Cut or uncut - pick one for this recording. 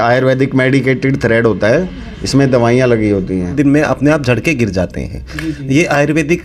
cut